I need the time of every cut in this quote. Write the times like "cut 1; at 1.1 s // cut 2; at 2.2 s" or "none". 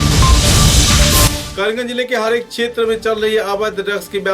cut 1; at 1.4 s

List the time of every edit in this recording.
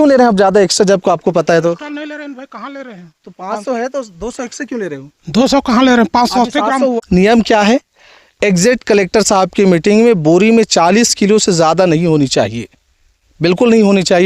cut 1; at 7.0 s

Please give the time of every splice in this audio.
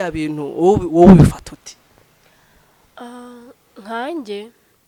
none

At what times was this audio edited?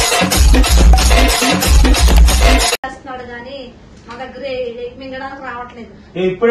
cut 1; at 2.7 s

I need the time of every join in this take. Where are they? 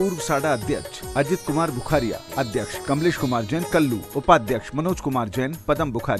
cut 1; at 2.7 s // cut 2; at 4.0 s

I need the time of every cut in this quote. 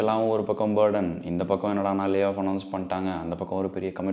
none

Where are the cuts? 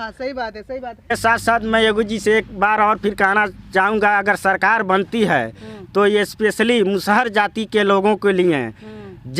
cut 1; at 1.2 s

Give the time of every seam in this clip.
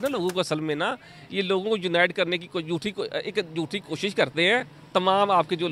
none

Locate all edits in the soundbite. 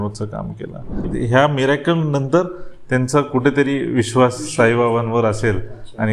cut 1; at 1.1 s

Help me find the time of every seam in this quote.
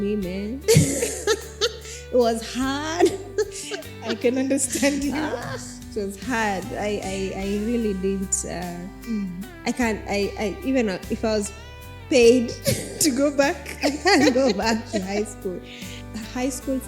cut 1; at 15.9 s

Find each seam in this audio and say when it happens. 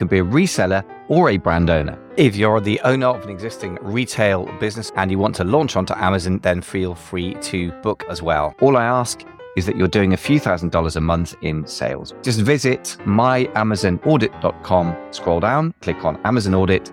cut 1; at 2.0 s // cut 2; at 4.8 s // cut 3; at 8.1 s // cut 4; at 12.1 s

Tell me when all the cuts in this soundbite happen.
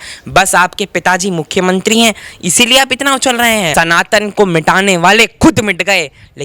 cut 1; at 3.7 s

